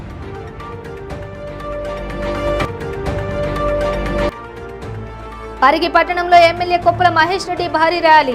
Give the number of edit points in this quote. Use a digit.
1